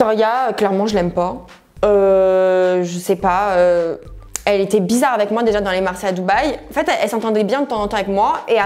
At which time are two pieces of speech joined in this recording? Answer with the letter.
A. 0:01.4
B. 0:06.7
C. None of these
C